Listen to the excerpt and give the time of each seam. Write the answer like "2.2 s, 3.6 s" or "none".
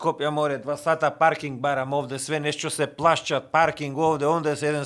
none